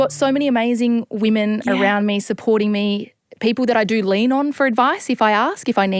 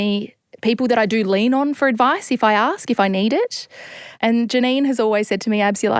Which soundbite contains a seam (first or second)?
second